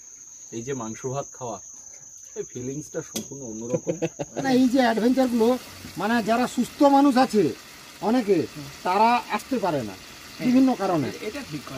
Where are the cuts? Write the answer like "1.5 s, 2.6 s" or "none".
4.5 s